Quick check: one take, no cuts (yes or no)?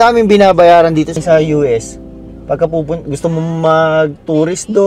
no